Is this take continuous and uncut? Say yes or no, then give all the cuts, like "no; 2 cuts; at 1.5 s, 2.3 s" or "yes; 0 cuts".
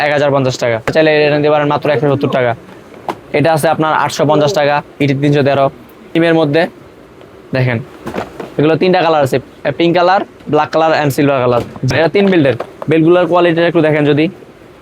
no; 2 cuts; at 0.9 s, 6.2 s